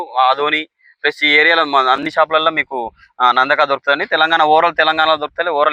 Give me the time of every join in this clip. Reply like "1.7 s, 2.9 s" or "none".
none